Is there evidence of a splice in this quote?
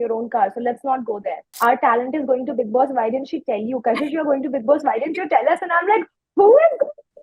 yes; 1 cut; at 1.4 s

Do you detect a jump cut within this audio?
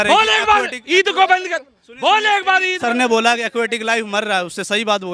yes; 1 cut; at 2.8 s

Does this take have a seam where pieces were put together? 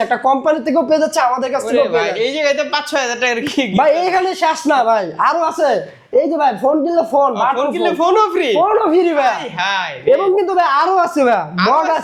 no; 0 cuts

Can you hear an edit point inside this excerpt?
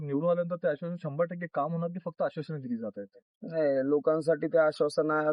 no; 0 cuts

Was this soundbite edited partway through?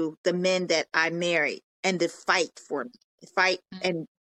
no; 0 cuts

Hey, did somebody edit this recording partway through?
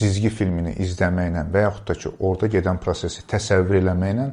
no; 0 cuts

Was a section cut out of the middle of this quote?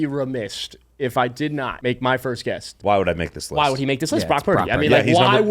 yes; 2 cuts; at 1.7 s, 2.7 s

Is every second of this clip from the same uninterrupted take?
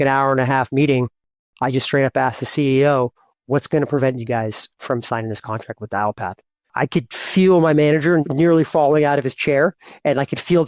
no; 2 cuts; at 6.7 s, 8.2 s

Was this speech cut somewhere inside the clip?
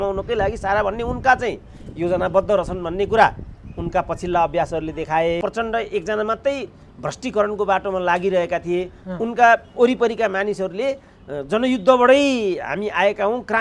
yes; 1 cut; at 5.4 s

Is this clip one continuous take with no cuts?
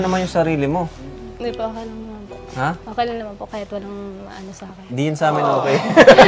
yes; 0 cuts

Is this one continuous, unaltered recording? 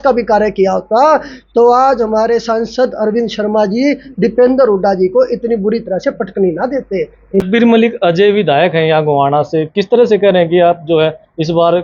no; 1 cut; at 7.4 s

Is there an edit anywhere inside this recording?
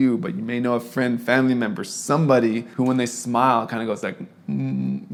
no; 0 cuts

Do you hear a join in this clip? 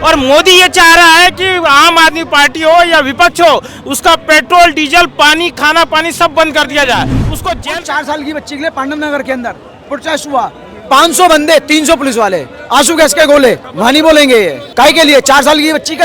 yes; 3 cuts; at 7.6 s, 13.7 s, 14.6 s

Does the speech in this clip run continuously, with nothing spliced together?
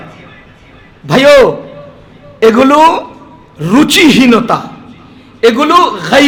yes; 0 cuts

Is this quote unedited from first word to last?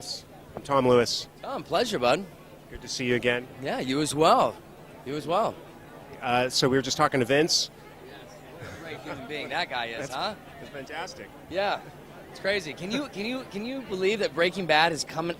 no; 1 cut; at 3.9 s

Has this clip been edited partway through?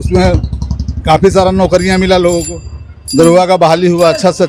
no; 0 cuts

